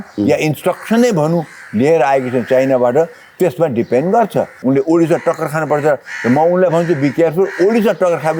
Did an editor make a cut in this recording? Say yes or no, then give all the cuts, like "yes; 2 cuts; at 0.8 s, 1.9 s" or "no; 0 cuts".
yes; 1 cut; at 4.5 s